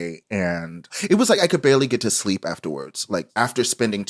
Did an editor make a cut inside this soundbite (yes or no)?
yes